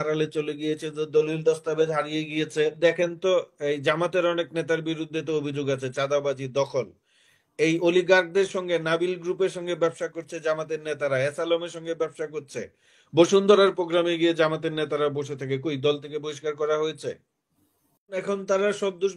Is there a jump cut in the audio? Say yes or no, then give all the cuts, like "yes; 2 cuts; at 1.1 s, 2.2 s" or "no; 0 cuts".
yes; 2 cuts; at 2.8 s, 18.2 s